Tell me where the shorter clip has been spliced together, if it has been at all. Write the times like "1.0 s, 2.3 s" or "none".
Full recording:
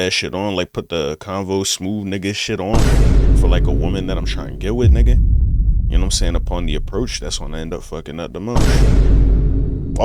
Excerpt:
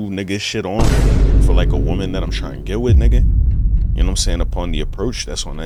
none